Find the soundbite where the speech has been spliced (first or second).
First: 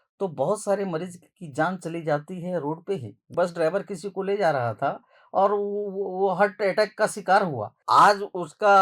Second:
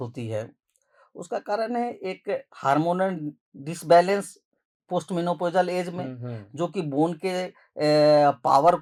first